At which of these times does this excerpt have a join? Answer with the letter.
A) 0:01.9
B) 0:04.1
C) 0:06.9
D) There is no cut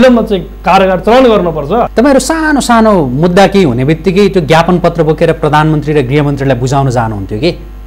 A